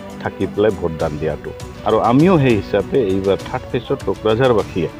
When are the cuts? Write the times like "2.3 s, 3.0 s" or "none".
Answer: 1.7 s